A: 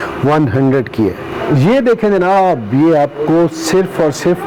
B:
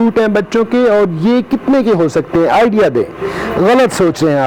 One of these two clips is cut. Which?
A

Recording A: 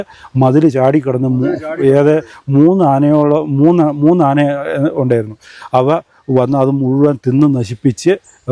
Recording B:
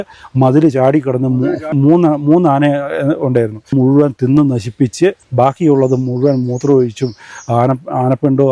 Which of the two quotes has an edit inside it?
B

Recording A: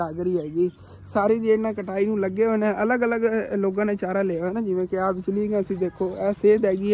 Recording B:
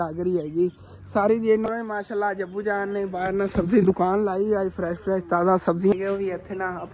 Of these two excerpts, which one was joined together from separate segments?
B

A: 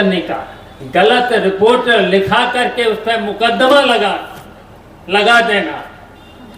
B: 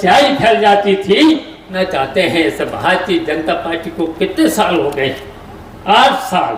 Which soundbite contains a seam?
B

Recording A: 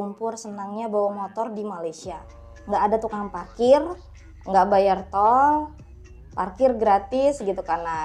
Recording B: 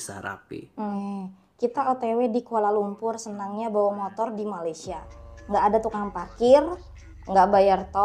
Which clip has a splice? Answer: B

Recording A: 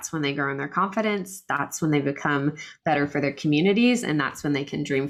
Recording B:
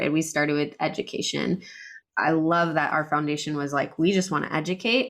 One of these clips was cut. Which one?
B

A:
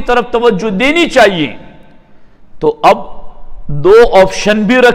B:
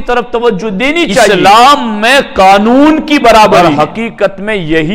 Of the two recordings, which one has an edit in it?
B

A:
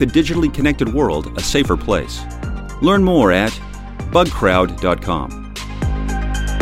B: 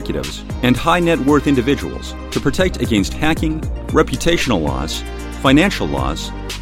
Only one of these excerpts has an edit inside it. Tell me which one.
A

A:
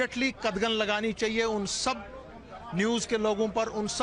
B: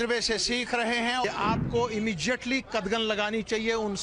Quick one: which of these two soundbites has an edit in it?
B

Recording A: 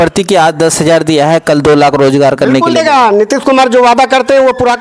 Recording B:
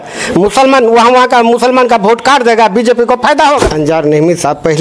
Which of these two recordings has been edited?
B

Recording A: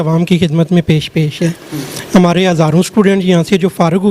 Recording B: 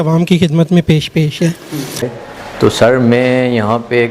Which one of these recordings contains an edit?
B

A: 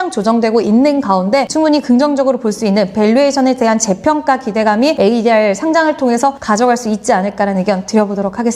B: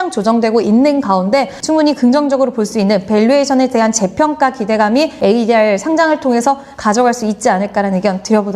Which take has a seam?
A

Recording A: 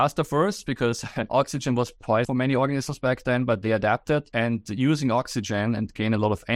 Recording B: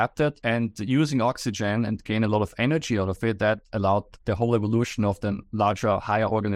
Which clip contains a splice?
A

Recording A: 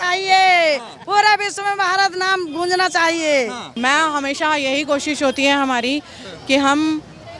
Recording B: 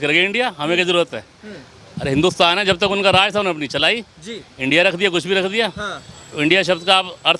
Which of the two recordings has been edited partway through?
A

